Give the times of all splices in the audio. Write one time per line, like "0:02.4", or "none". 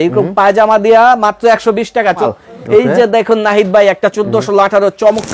0:02.3